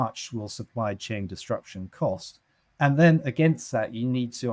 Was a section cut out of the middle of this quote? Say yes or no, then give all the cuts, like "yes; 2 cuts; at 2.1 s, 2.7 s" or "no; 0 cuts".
no; 0 cuts